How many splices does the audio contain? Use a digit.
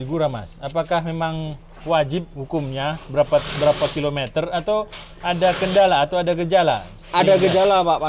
0